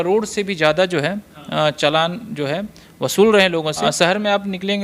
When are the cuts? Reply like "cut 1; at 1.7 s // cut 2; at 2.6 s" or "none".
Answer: cut 1; at 3.8 s